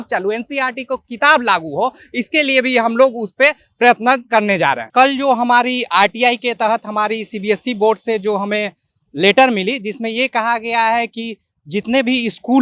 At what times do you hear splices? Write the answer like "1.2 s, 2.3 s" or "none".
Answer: 4.8 s